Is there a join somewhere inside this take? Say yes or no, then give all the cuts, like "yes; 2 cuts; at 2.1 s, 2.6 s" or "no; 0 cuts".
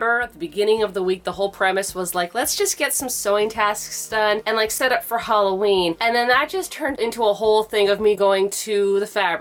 no; 0 cuts